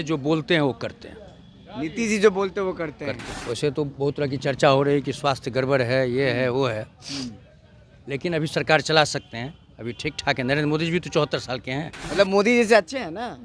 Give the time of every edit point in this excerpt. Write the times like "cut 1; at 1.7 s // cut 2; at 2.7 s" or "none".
cut 1; at 3.3 s // cut 2; at 12.0 s